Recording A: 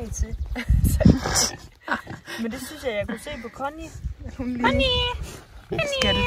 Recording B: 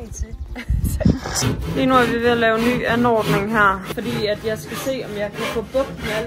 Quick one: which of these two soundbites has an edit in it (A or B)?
B